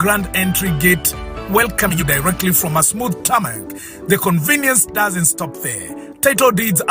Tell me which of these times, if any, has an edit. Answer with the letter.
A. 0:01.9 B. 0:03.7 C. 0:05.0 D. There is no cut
A